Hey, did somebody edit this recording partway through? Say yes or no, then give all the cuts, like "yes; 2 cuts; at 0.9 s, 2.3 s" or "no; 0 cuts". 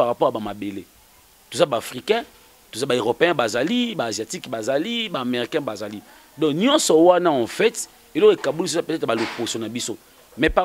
no; 0 cuts